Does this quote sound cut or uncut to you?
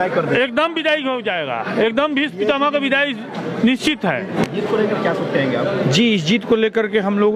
uncut